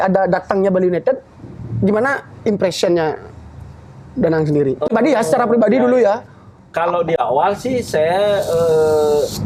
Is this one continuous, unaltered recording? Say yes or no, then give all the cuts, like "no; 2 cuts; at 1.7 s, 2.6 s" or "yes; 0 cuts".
yes; 0 cuts